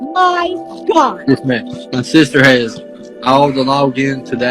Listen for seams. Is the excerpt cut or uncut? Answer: cut